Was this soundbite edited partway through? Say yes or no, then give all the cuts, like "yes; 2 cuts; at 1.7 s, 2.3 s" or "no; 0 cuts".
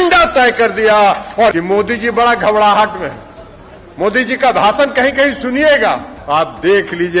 yes; 2 cuts; at 1.5 s, 6.1 s